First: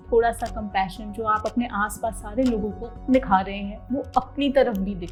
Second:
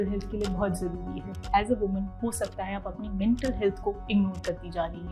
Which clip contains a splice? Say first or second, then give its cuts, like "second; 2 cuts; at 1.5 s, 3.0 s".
second; 1 cut; at 1.4 s